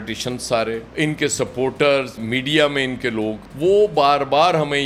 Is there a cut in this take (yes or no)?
no